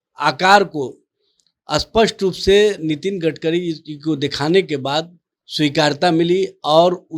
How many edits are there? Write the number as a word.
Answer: zero